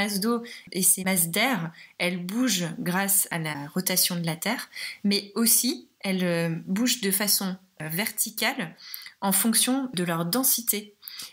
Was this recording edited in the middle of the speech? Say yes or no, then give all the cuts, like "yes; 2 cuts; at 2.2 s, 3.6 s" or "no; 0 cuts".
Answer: yes; 2 cuts; at 1.1 s, 3.5 s